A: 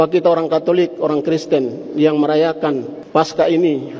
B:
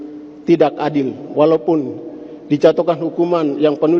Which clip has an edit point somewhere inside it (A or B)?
A